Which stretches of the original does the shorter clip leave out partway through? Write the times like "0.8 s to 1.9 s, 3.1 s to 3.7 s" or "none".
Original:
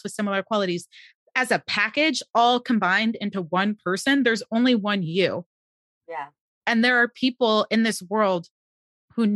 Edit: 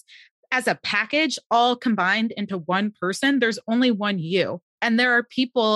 5.5 s to 6.5 s